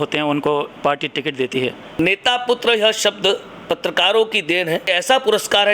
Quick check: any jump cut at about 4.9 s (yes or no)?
yes